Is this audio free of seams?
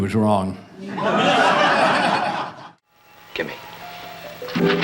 no; 1 cut; at 2.5 s

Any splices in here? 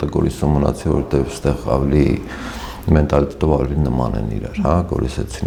no; 0 cuts

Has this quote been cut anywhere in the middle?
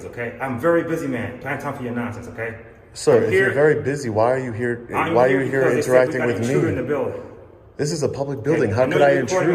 no; 0 cuts

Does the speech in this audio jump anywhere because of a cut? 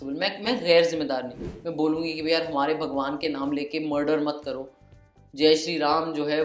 yes; 1 cut; at 1.4 s

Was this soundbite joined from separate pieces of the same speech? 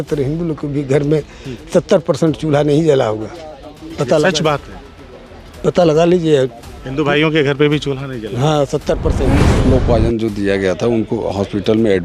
yes; 1 cut; at 9.5 s

